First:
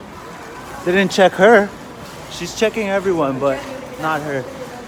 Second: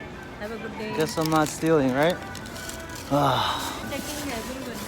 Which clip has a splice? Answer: second; 1 cut; at 3.8 s

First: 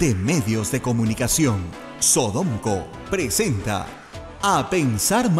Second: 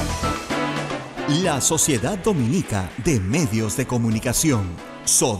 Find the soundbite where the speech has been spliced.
second; 1 cut; at 1.1 s

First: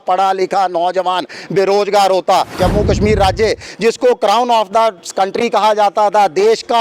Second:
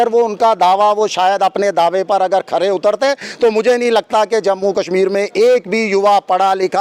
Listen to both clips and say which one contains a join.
first; 1 cut; at 2.6 s

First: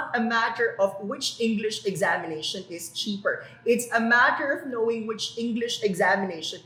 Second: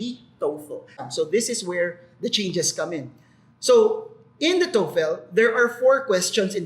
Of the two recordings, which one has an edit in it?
second; 1 cut; at 0.9 s

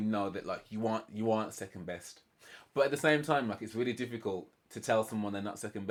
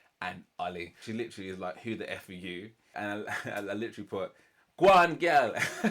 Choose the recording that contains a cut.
second; 2 cuts; at 0.9 s, 2.9 s

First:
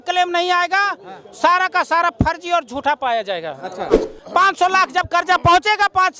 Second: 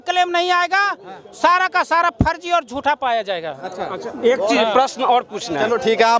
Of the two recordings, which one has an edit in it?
first; 1 cut; at 4.0 s

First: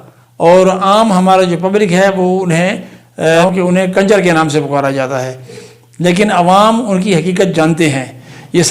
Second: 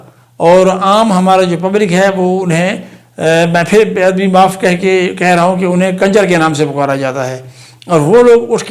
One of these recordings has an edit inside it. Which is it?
first; 2 cuts; at 3.5 s, 5.7 s

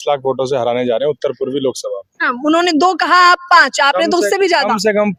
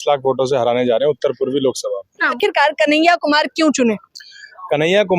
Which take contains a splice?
second; 1 cut; at 2.3 s

